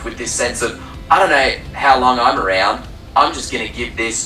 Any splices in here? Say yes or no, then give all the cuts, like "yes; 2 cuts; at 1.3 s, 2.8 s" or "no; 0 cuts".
no; 0 cuts